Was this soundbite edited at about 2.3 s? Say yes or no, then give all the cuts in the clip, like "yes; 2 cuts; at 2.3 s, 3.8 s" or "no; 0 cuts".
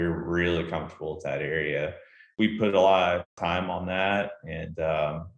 yes; 2 cuts; at 2.3 s, 3.3 s